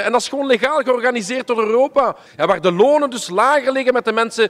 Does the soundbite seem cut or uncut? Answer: cut